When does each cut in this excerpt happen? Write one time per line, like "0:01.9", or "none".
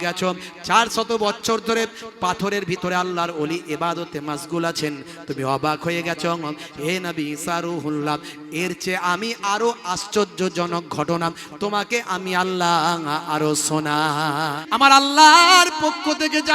0:14.6